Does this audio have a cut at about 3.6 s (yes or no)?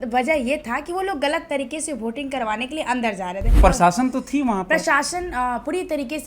yes